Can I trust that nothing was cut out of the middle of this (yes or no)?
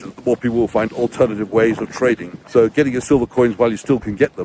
no